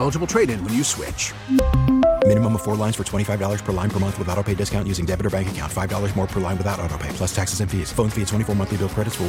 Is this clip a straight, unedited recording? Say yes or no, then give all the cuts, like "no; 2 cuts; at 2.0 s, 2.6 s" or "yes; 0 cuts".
yes; 0 cuts